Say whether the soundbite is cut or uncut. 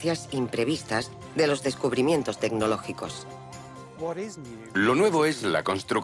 uncut